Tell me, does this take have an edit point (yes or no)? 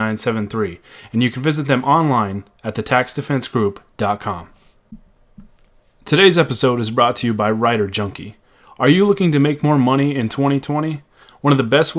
yes